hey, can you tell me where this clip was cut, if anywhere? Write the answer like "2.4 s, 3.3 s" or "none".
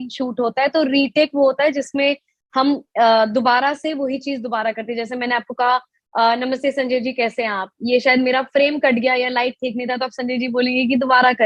none